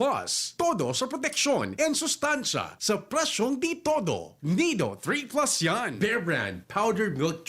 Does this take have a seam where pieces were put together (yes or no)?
yes